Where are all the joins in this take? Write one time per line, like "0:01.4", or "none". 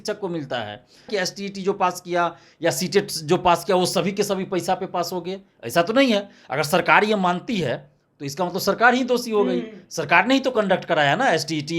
0:01.1